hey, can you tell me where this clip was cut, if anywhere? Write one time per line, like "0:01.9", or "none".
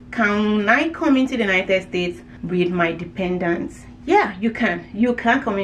0:02.3